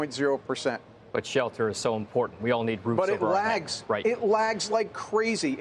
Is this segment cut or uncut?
uncut